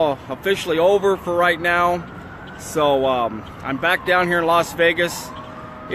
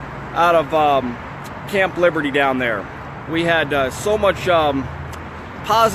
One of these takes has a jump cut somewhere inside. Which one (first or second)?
second